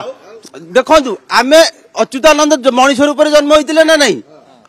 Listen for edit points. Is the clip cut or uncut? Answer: uncut